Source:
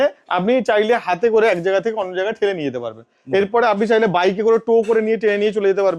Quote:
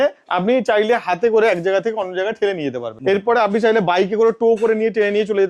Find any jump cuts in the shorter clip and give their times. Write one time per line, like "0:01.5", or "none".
0:02.9